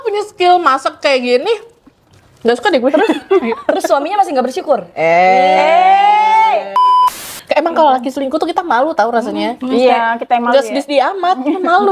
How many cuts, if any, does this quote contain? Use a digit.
1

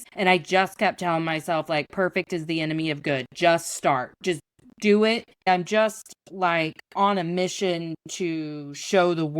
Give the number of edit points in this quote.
1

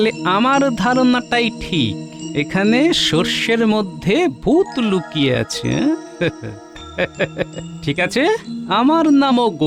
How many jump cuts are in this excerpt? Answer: 0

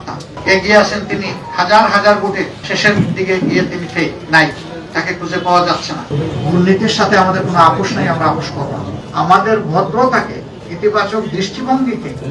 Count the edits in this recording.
2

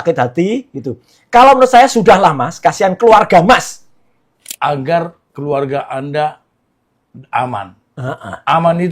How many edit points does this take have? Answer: 1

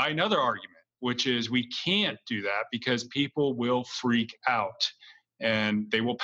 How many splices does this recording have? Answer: 0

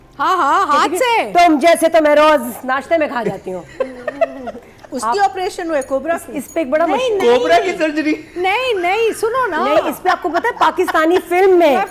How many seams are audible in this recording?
0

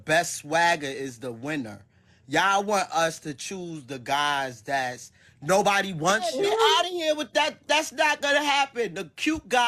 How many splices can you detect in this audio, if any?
1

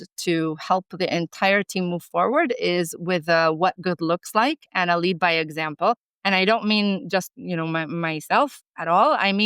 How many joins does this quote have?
1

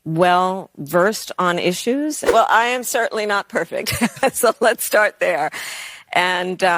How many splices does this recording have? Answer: 1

